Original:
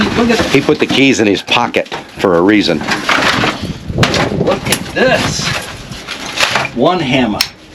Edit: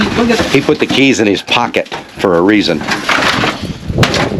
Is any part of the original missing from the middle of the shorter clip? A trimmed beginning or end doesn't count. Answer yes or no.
no